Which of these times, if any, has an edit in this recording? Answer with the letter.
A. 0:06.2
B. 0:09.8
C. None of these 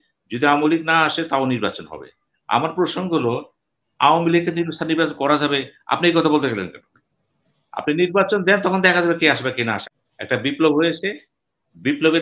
B